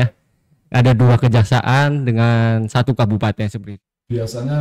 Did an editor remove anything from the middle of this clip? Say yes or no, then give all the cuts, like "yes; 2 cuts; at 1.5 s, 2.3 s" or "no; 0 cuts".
yes; 1 cut; at 3.6 s